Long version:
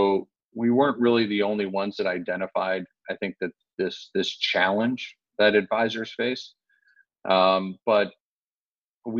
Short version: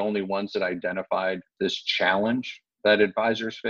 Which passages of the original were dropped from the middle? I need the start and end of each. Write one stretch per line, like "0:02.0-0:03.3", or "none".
0:02.9-0:04.0

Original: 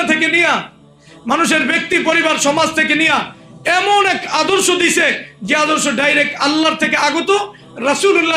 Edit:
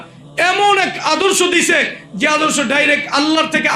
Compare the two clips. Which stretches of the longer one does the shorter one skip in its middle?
none

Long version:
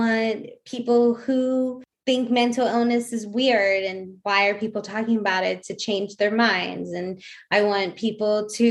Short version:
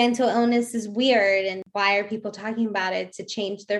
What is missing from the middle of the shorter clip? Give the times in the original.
0:04.0-0:04.1

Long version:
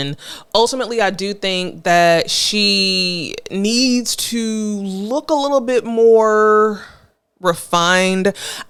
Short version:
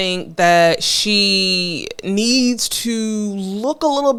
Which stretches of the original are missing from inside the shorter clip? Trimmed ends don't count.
none

